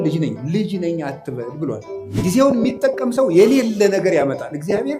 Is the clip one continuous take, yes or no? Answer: no